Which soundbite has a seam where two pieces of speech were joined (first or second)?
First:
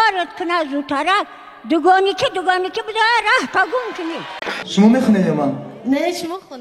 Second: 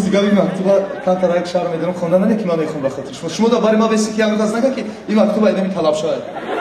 first